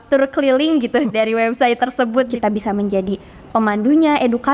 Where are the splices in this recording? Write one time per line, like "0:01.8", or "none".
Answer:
0:02.3